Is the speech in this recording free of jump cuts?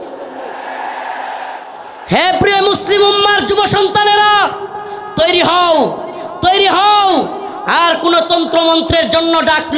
no; 1 cut; at 1.6 s

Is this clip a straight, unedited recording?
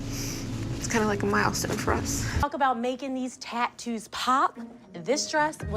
no; 1 cut; at 2.4 s

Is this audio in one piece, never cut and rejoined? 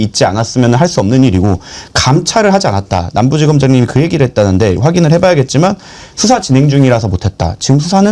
yes; 0 cuts

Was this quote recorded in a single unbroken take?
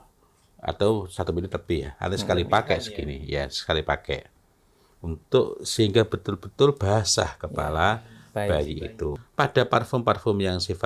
no; 1 cut; at 9.2 s

